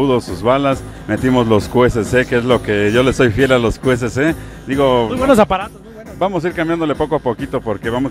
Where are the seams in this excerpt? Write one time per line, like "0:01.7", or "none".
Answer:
none